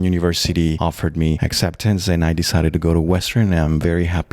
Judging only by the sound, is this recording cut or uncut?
cut